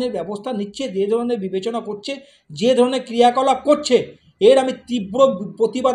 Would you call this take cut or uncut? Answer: uncut